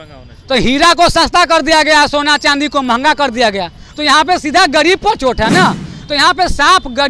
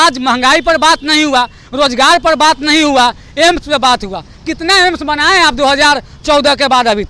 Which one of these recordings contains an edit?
first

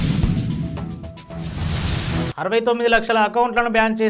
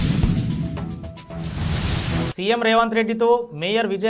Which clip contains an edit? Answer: second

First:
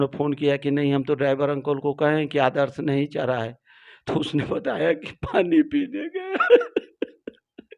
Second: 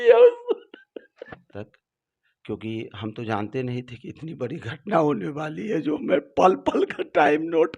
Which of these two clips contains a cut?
second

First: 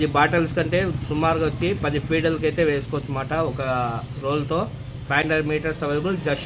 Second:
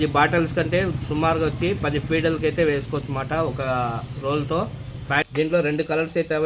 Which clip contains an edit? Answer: second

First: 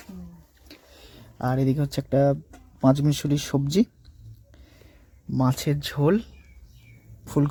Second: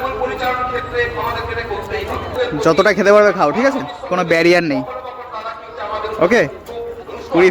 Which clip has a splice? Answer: second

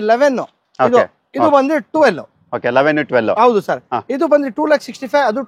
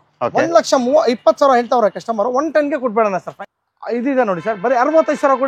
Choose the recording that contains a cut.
second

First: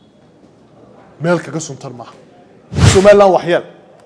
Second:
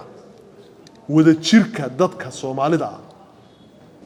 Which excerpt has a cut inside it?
first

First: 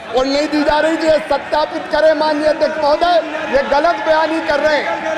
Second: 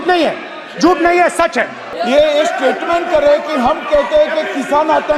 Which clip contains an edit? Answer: second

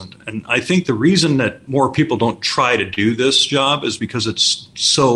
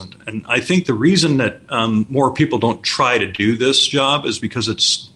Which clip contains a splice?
first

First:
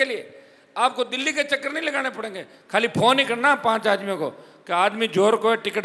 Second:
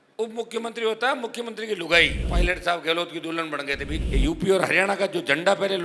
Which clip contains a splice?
second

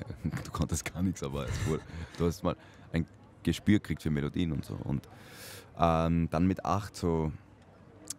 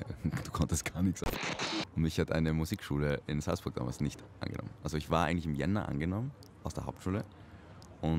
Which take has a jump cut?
second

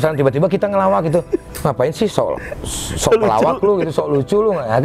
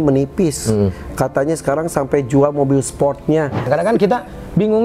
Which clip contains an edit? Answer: second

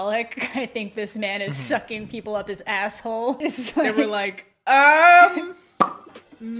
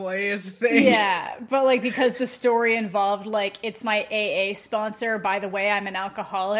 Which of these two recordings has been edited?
first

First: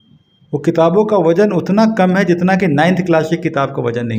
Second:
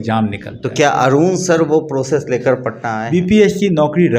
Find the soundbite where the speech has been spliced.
second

